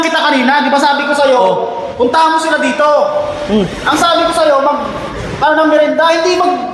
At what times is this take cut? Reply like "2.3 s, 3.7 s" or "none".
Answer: none